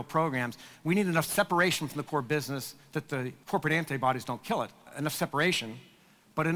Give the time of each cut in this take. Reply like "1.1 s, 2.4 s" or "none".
3.4 s, 4.9 s